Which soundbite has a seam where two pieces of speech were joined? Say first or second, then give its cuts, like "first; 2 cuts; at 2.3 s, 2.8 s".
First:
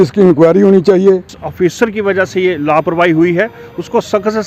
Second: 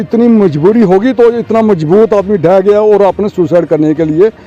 first; 1 cut; at 1.4 s